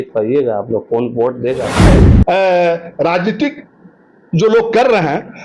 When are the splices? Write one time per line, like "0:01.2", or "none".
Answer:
0:01.8